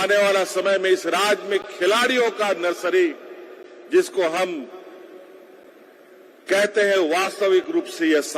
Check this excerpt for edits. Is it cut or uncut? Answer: uncut